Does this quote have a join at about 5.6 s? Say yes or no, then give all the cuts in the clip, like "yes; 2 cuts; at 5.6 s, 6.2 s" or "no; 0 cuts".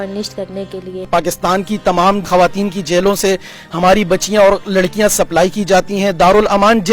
no; 2 cuts; at 1.1 s, 2.3 s